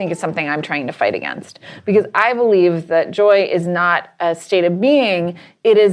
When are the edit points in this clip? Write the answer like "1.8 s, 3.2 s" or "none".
none